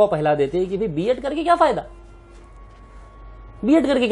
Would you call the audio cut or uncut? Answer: uncut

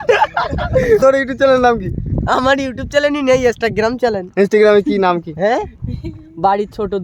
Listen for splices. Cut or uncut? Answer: cut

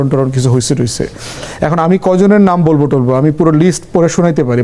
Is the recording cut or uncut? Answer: uncut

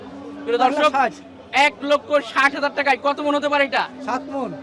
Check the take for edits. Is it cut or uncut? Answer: uncut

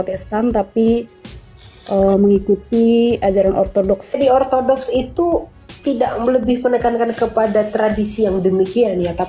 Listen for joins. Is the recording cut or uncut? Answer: cut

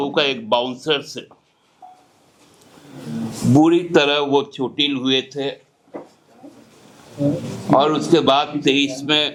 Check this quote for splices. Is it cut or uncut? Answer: uncut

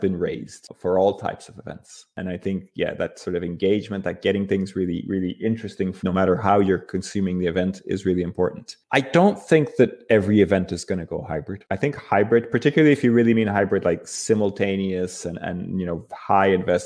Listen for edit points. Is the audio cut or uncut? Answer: uncut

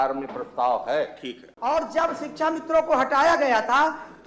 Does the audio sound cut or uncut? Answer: cut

